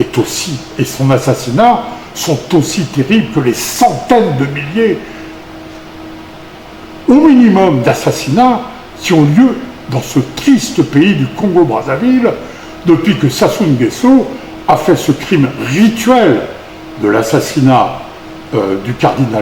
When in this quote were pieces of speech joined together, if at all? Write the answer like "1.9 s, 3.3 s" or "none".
none